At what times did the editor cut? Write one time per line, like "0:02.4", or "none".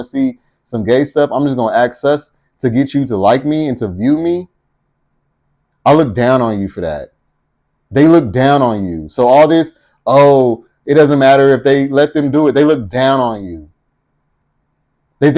none

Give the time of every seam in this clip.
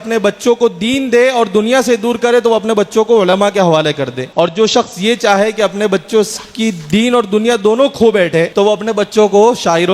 0:04.2
0:08.5

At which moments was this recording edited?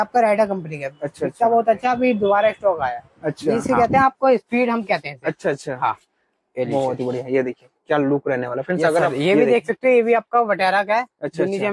0:03.6
0:09.1

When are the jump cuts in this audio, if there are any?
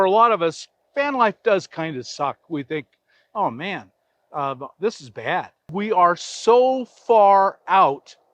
0:05.7

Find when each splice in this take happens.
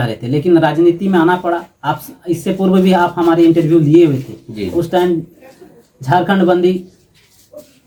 none

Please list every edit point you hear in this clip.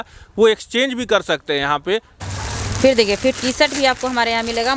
0:02.1

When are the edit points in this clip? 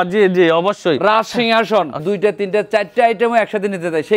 0:02.0

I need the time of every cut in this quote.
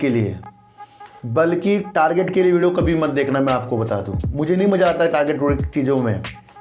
none

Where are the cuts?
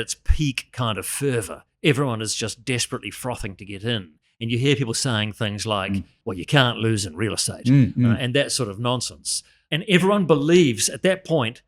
0:06.1
0:09.6

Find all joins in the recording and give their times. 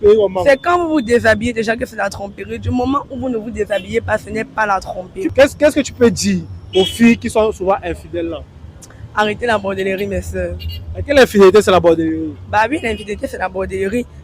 0:05.3

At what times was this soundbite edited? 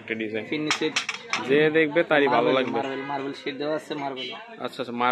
none

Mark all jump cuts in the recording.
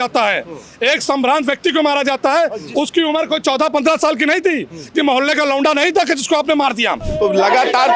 0:07.0

